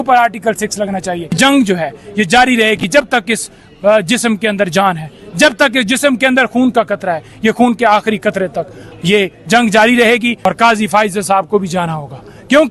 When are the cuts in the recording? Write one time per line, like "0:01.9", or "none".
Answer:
0:01.3
0:10.4